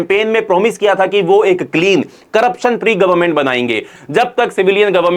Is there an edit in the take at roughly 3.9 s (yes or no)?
yes